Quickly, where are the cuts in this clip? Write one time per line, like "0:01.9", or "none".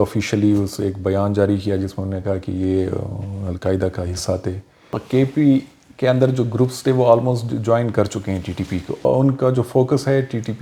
0:05.0
0:09.0